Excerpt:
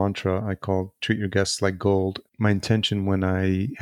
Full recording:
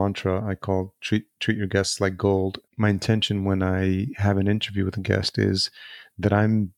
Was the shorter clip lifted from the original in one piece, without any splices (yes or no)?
no